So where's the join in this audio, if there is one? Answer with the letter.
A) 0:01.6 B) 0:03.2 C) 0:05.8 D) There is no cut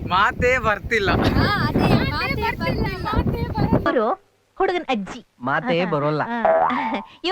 A